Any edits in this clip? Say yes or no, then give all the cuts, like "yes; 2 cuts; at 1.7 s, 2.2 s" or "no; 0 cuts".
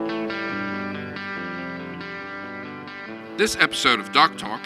yes; 1 cut; at 3.4 s